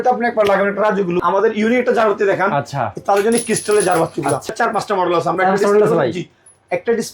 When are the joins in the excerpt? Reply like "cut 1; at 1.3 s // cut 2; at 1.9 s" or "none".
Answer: cut 1; at 1.2 s // cut 2; at 4.5 s